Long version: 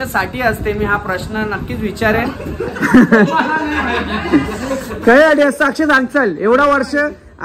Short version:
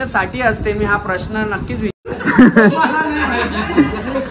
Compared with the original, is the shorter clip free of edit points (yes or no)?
no